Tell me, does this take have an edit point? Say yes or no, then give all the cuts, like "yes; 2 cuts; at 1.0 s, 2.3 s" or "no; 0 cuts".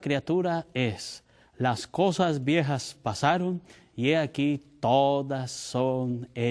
no; 0 cuts